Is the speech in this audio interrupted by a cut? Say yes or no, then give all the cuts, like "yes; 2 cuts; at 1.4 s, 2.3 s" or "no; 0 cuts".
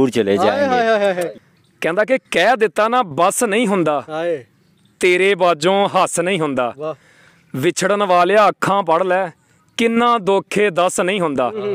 yes; 1 cut; at 1.3 s